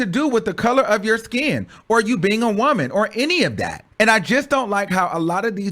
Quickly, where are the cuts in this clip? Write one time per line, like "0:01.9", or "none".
0:03.8